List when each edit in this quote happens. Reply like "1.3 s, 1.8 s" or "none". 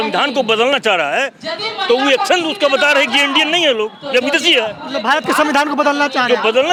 none